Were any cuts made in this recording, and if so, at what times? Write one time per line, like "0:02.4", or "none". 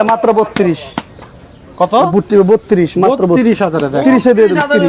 none